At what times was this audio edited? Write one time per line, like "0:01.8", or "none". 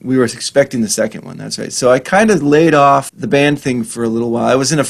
0:03.1